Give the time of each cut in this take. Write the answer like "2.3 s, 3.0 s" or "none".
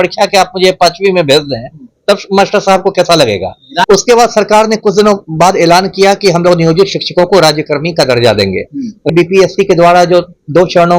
3.8 s, 9.1 s